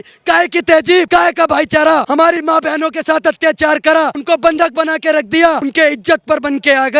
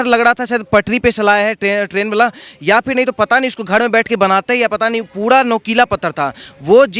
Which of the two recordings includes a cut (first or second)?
first